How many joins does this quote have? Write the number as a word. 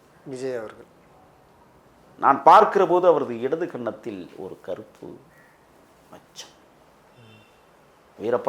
one